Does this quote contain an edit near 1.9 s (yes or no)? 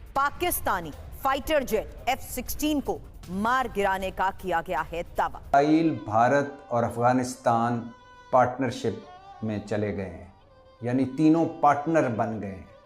no